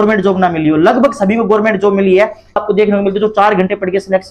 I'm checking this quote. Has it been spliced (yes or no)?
yes